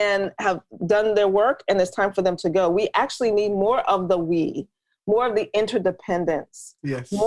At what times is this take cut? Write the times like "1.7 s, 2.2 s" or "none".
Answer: none

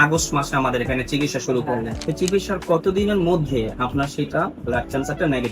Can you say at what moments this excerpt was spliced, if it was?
2.0 s

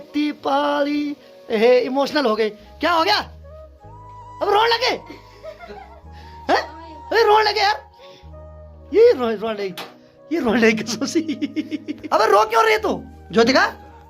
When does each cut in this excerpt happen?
11.9 s, 13.1 s

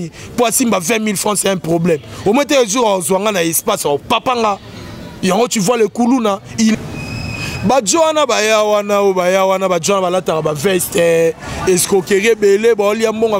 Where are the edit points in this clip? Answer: 6.7 s

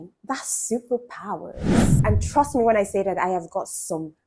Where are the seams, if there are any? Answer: 1.9 s

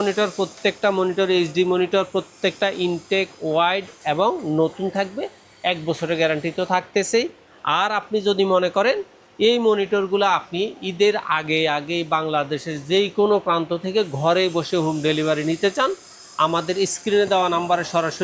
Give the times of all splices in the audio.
none

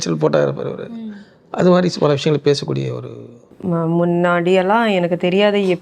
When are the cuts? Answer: 3.5 s

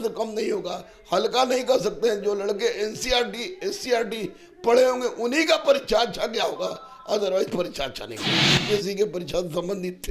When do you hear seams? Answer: 8.3 s

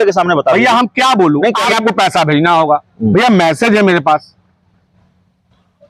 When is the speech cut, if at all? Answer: 1.7 s

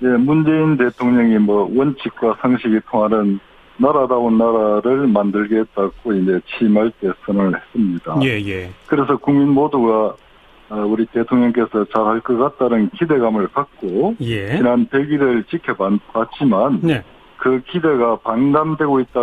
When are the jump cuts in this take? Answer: none

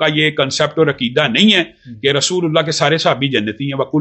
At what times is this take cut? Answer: none

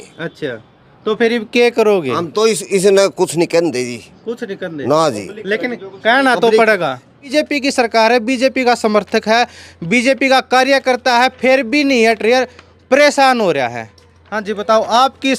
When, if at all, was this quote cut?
7.3 s

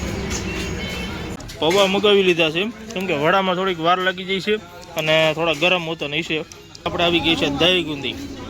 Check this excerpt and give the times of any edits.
1.4 s, 6.9 s

